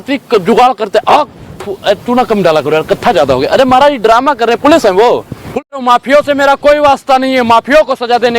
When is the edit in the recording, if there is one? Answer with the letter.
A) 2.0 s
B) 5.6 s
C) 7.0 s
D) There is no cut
B